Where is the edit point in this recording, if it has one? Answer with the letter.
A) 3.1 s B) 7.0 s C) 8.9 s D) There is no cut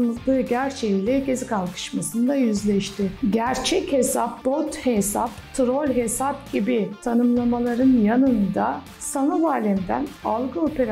A